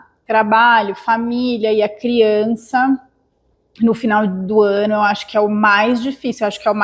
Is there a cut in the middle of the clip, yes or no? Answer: no